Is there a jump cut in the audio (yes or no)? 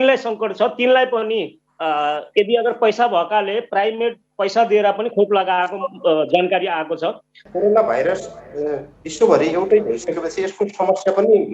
yes